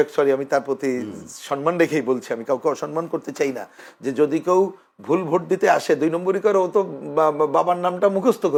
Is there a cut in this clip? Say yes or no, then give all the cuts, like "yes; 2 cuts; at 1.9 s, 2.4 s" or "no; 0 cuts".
no; 0 cuts